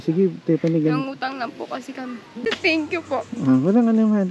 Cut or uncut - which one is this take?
cut